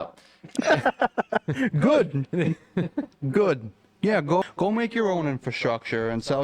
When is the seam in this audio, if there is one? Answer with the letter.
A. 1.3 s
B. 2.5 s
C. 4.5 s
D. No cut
C